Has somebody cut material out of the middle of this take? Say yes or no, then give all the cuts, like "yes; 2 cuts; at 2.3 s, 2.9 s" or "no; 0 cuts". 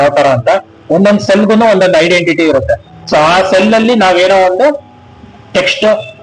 no; 0 cuts